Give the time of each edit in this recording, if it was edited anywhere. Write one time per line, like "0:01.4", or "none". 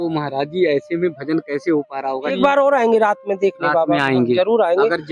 0:02.3